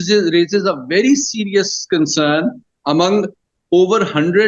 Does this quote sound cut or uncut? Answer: uncut